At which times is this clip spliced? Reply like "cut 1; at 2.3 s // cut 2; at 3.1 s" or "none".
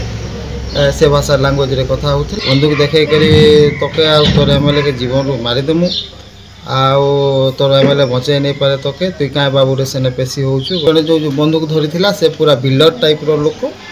cut 1; at 2.3 s // cut 2; at 10.8 s

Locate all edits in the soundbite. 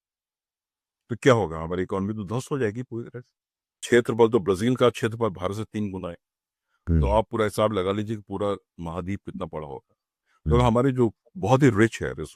cut 1; at 3.8 s

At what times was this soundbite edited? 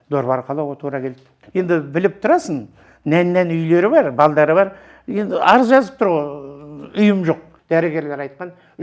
cut 1; at 1.4 s // cut 2; at 7.5 s

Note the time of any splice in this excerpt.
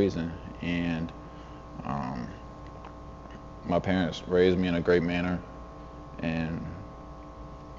none

